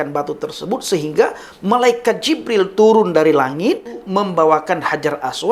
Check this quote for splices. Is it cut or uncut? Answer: cut